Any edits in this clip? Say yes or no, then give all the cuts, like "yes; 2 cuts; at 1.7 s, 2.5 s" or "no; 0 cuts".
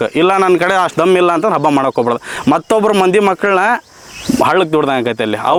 no; 0 cuts